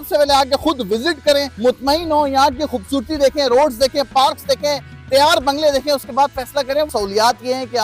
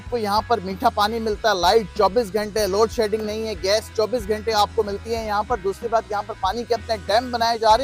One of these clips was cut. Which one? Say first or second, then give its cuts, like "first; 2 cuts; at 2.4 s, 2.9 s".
first; 2 cuts; at 1.5 s, 6.9 s